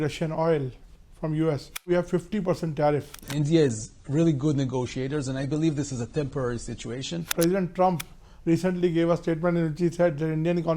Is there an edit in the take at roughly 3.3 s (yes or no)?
yes